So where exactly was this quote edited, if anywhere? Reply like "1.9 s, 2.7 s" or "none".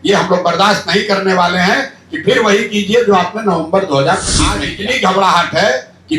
4.7 s